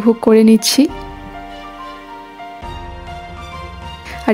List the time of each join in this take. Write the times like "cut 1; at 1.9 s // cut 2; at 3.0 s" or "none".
cut 1; at 2.6 s